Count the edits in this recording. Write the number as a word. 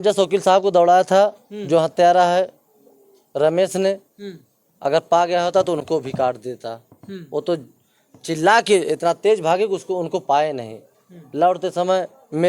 zero